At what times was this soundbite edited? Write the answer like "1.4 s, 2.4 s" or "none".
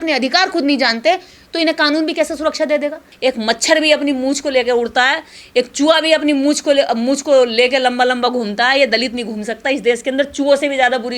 3.1 s